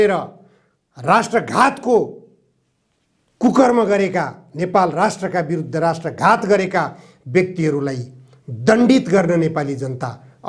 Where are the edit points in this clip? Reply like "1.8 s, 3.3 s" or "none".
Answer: none